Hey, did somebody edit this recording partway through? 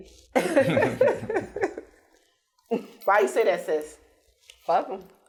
no; 0 cuts

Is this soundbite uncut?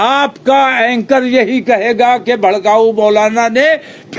yes; 0 cuts

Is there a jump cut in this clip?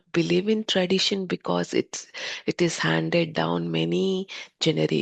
no; 0 cuts

